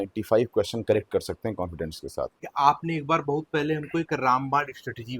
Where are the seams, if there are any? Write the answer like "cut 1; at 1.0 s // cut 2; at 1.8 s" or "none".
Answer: cut 1; at 2.4 s